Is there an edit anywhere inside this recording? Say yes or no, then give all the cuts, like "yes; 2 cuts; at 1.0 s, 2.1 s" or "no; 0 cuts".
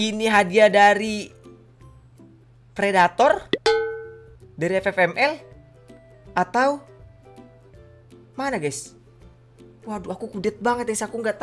no; 0 cuts